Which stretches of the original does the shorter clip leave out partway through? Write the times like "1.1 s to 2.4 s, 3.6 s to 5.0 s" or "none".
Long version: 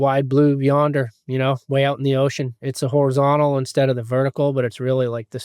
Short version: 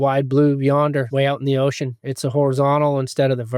1.1 s to 1.7 s

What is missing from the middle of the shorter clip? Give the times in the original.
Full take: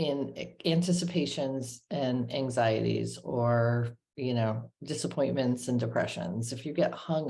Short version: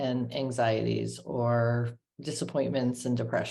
4.1 s to 4.7 s

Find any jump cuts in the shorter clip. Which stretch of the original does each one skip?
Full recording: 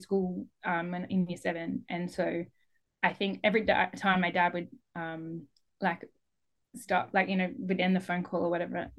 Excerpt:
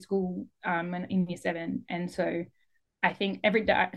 none

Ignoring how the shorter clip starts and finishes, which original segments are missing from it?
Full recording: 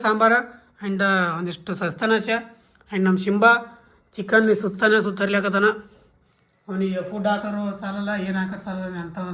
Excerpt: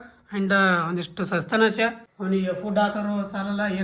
2.6 s to 6.6 s

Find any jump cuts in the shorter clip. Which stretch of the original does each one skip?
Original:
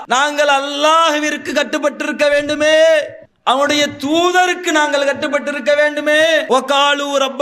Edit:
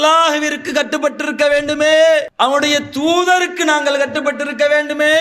3.1 s to 3.4 s

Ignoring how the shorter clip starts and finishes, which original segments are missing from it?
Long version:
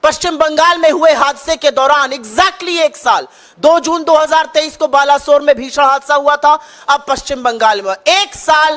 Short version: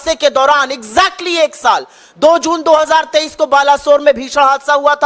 none

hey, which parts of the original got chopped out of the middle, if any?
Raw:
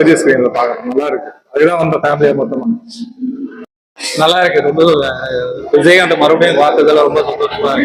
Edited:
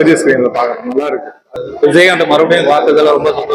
1.4 s to 5.3 s

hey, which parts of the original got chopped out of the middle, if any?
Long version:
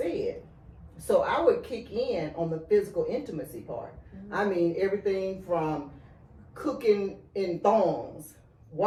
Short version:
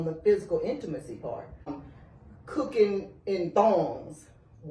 4.2 s to 5.8 s

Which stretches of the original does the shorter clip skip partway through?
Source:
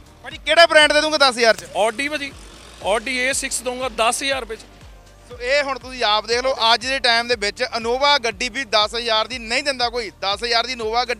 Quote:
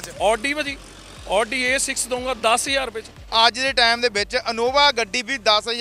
4.9 s to 6.6 s

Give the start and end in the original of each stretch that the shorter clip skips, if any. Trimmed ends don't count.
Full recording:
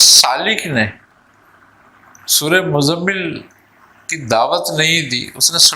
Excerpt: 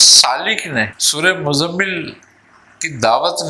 1.0 s to 2.3 s

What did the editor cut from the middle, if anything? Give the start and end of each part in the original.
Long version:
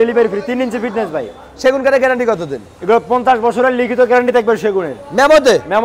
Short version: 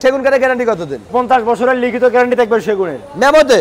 2.7 s to 3.1 s

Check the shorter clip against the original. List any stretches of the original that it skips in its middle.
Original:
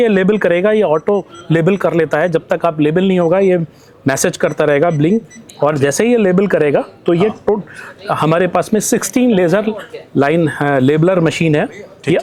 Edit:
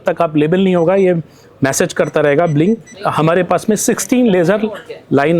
5.4 s to 8.0 s

